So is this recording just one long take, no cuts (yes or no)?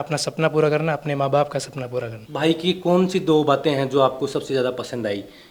no